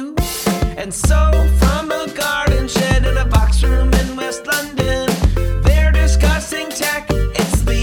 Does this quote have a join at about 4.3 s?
no; 0 cuts

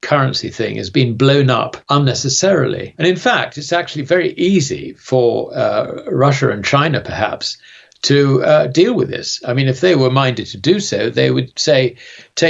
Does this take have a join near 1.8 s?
yes; 2 cuts; at 1.8 s, 2.9 s

